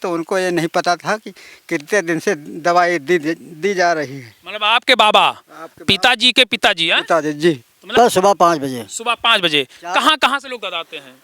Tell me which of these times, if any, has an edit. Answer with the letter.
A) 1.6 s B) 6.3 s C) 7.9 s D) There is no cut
C